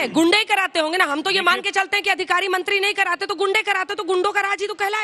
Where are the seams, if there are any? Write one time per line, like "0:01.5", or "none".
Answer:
none

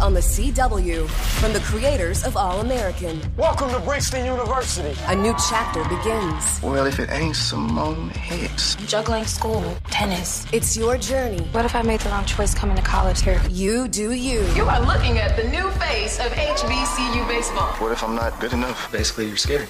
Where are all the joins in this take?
none

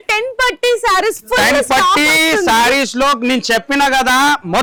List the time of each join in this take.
none

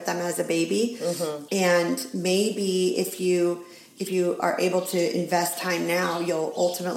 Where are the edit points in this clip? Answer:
0:01.4

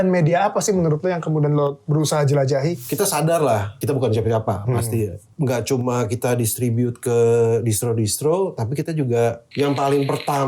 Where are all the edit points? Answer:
0:02.8
0:03.8
0:05.2
0:09.4

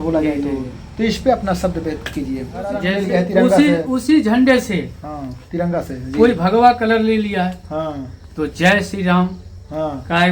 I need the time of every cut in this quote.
0:02.9

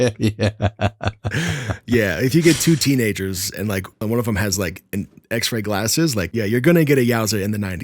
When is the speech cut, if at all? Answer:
0:04.0
0:06.3

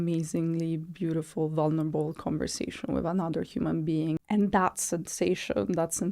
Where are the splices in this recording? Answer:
0:04.2

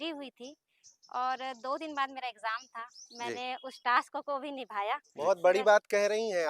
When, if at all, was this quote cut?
0:05.1

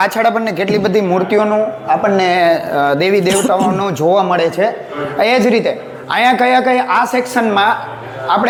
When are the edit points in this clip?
none

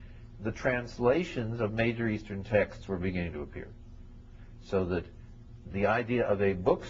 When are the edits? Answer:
0:04.8

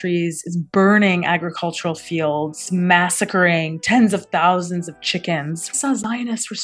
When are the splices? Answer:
0:02.7
0:05.7

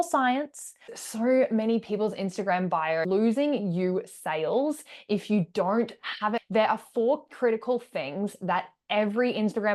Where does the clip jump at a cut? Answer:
0:01.0
0:03.0
0:06.4

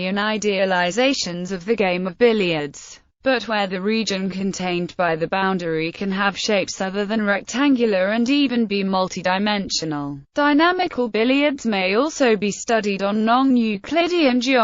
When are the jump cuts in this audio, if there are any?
0:07.1

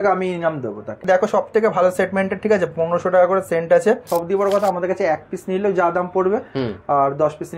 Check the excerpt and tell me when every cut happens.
0:01.0
0:04.1

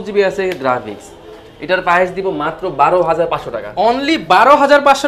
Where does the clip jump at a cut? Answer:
none

